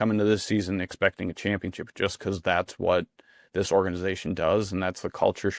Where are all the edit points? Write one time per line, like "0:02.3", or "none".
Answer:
none